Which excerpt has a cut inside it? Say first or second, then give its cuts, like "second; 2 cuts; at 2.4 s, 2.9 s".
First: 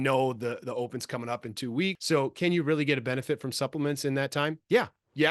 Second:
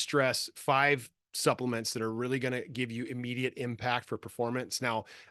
first; 1 cut; at 2.0 s